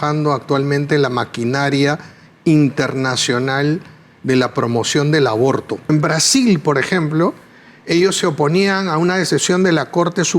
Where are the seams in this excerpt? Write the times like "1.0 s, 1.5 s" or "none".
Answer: 5.9 s